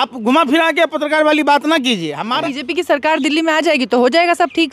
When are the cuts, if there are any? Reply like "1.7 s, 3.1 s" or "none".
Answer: 2.5 s